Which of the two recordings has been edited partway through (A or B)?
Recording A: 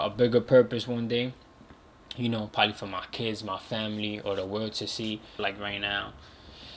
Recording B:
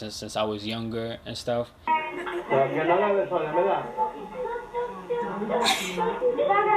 A